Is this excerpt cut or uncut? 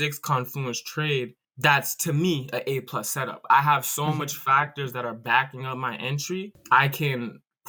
uncut